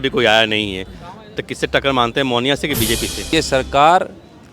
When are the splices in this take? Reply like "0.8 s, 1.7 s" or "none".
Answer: 3.2 s